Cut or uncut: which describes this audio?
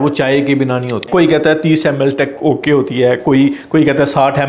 cut